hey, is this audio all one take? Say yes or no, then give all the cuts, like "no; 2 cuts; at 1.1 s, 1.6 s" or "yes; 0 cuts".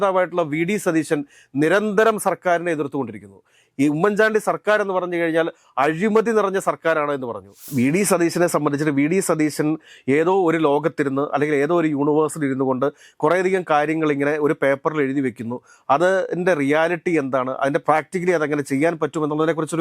no; 2 cuts; at 7.7 s, 17.8 s